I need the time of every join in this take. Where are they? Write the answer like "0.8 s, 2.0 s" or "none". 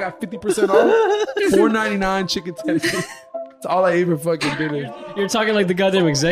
5.2 s